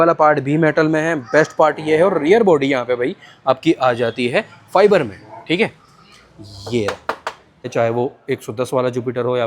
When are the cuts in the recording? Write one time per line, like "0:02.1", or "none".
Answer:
0:07.7